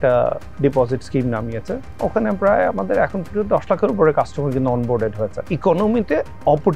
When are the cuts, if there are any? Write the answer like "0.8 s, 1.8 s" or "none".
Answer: 5.4 s